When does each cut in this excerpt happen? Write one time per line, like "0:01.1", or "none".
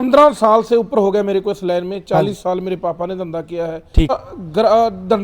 0:04.1